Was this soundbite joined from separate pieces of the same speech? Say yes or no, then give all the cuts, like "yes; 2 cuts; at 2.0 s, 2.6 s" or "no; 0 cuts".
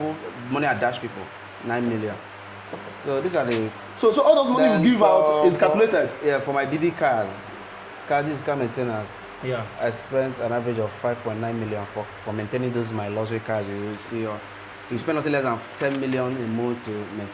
no; 0 cuts